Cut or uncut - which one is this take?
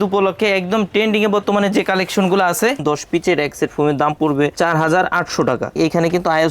cut